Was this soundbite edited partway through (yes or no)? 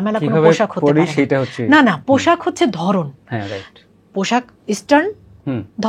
no